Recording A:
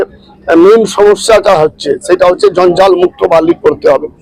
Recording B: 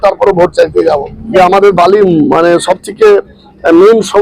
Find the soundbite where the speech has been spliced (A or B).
B